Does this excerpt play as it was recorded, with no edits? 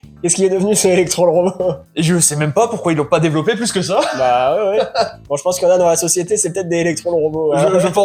yes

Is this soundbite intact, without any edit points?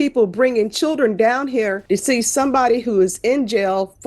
no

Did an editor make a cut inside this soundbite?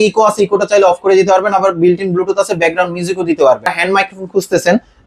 yes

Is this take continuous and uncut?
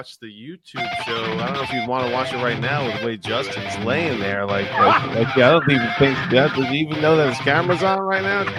yes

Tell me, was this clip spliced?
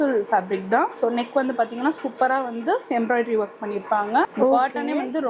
yes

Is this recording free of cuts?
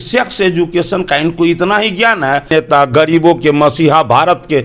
no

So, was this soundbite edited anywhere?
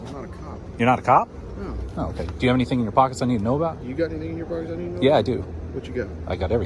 no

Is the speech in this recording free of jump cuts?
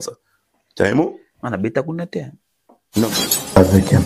no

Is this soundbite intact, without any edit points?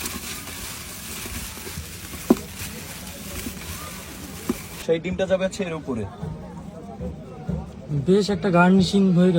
no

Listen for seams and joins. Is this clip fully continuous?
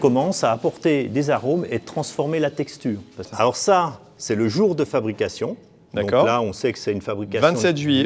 no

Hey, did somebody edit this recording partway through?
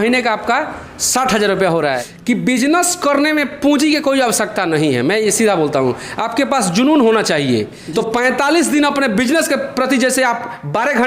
yes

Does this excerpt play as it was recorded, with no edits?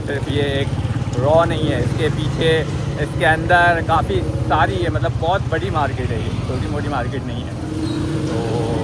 yes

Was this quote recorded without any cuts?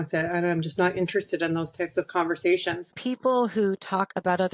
no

